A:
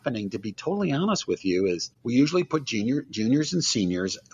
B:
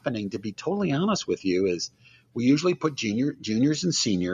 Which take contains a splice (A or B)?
A